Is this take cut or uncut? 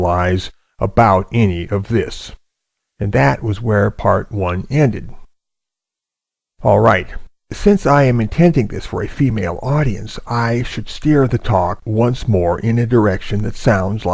cut